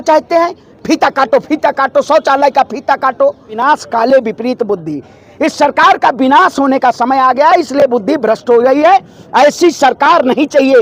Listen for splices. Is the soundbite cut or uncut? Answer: cut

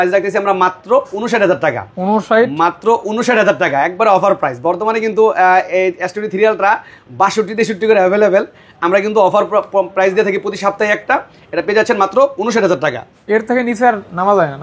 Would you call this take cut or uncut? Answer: uncut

